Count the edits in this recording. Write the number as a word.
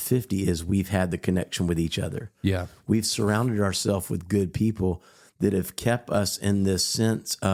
zero